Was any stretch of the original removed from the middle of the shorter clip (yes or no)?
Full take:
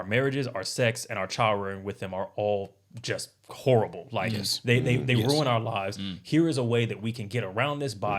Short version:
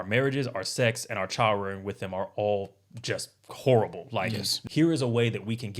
yes